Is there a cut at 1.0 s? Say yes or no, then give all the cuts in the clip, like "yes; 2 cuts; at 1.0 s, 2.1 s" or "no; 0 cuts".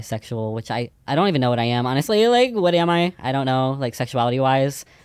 yes; 1 cut; at 1.0 s